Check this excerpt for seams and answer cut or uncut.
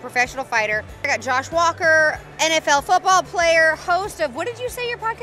cut